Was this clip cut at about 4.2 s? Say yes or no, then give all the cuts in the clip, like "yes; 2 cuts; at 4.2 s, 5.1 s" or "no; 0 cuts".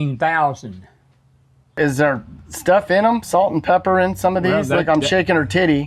no; 1 cut; at 1.8 s